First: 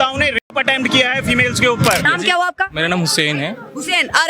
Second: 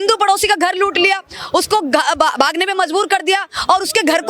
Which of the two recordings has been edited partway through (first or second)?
first